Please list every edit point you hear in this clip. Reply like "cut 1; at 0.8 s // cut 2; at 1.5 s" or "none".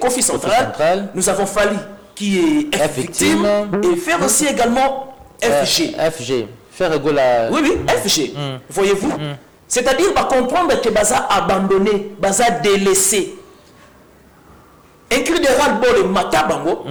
none

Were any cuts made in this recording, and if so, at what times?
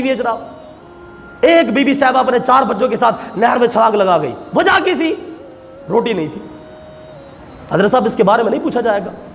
none

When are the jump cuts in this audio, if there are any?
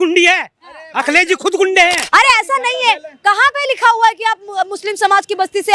cut 1; at 2.0 s

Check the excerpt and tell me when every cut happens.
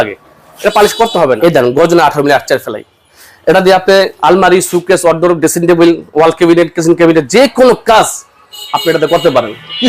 cut 1; at 1.4 s // cut 2; at 4.1 s

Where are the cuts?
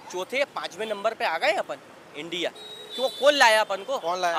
none

